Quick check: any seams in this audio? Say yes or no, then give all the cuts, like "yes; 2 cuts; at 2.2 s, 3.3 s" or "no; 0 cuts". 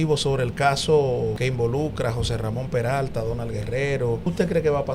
yes; 2 cuts; at 1.4 s, 4.2 s